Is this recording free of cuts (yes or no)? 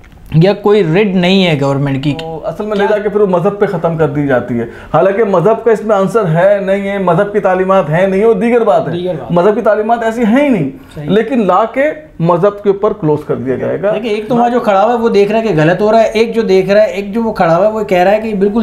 no